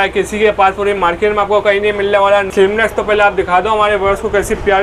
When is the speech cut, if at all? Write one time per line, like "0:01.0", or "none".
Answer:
0:02.5